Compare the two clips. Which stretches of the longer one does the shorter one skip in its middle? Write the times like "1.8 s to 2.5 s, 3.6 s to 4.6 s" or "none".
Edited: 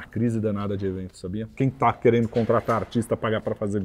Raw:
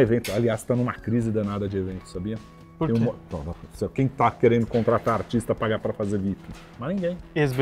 2.4 s to 3.9 s